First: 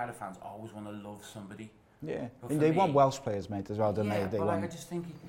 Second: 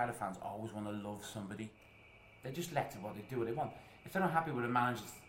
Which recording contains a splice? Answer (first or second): second